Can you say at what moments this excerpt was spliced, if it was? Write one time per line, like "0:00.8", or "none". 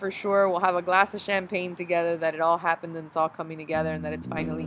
none